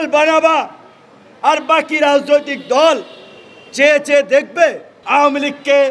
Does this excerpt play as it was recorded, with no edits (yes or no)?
no